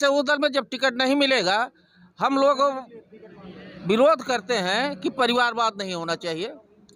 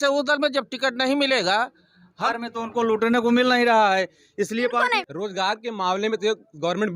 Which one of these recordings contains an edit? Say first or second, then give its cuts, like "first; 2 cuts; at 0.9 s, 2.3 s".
second; 2 cuts; at 2.3 s, 5.0 s